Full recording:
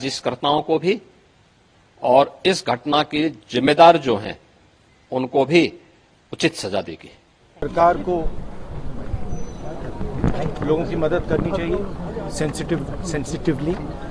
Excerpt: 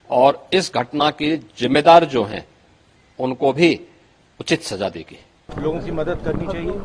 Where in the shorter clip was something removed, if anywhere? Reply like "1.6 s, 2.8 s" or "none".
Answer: 5.5 s